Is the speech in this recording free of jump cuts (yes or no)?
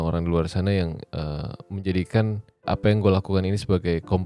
no